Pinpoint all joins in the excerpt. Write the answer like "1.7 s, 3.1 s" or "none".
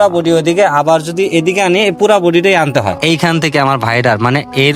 3.0 s